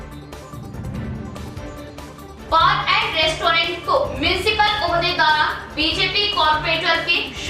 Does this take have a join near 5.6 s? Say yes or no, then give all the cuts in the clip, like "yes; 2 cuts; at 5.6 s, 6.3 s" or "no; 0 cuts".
no; 1 cut; at 1.1 s